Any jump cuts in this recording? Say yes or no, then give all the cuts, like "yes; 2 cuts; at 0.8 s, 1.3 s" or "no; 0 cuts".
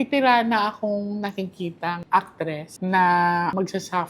yes; 1 cut; at 2.7 s